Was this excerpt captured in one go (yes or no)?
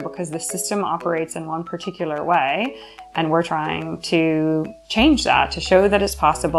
yes